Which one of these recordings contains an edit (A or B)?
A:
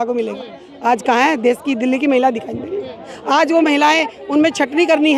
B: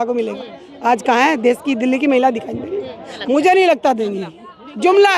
B